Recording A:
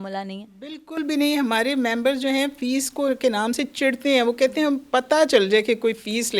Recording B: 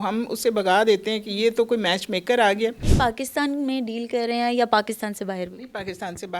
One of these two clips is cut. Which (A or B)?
B